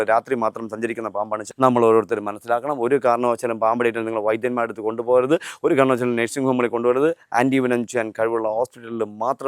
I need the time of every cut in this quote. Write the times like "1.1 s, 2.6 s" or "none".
1.5 s